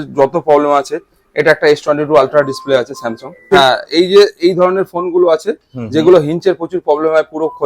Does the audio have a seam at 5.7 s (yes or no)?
no